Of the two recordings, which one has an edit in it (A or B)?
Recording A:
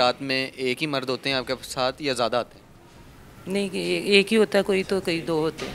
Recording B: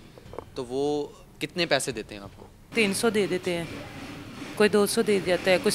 B